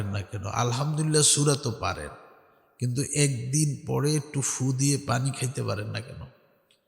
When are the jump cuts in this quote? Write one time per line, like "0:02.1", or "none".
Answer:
none